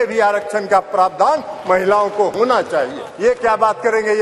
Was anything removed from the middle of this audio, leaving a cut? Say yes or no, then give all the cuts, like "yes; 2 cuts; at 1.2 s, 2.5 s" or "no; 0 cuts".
yes; 1 cut; at 3.0 s